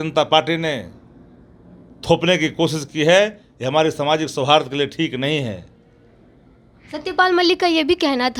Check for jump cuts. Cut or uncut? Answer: uncut